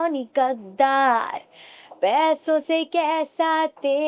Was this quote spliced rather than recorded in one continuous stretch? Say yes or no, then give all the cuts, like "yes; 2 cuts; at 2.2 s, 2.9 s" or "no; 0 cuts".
no; 0 cuts